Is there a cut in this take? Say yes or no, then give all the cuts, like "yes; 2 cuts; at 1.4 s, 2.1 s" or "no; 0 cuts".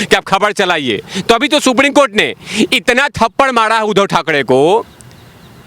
yes; 1 cut; at 1.1 s